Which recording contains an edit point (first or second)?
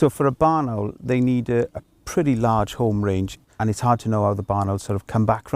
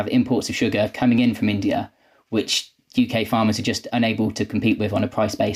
first